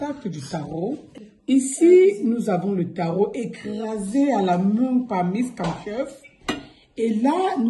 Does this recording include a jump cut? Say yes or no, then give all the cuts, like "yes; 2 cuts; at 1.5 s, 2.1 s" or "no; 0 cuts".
yes; 1 cut; at 1.1 s